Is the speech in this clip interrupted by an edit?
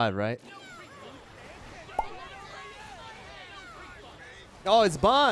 no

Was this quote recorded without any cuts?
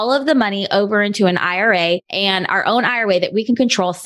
yes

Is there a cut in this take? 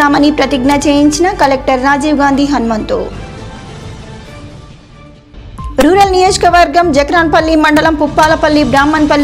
no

